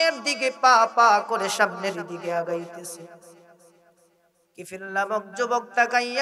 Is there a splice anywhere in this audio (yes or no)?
no